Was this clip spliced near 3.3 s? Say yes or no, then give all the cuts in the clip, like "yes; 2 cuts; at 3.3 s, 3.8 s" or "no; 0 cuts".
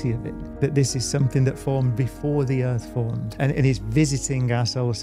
yes; 1 cut; at 3.3 s